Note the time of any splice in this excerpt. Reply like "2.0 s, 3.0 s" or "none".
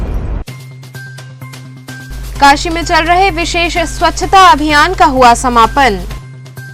2.0 s

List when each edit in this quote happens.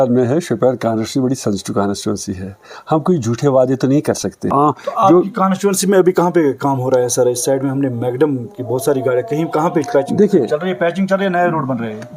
4.5 s

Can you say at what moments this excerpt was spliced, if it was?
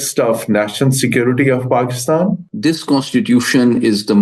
2.4 s

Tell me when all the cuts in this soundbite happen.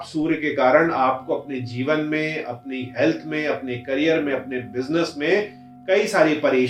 none

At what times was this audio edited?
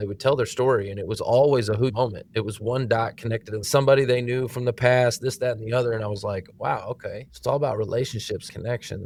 none

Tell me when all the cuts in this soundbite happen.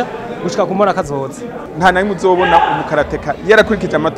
1.7 s

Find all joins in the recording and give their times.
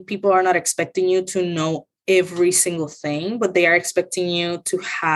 none

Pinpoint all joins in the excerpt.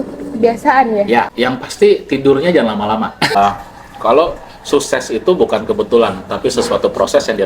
1.3 s, 3.3 s

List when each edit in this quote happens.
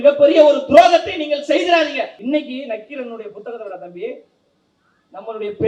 2.2 s

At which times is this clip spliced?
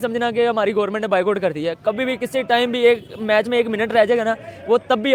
none

